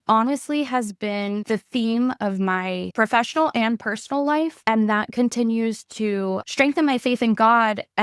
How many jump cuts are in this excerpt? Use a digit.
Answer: 4